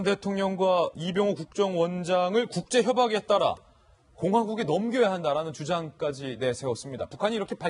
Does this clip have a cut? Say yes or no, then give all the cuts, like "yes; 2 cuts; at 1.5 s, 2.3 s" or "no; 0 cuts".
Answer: yes; 1 cut; at 3.6 s